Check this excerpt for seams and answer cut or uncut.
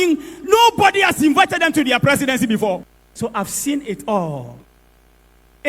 cut